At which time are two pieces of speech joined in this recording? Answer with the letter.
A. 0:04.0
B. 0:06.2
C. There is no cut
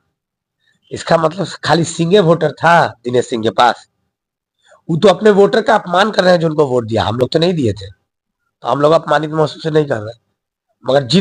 C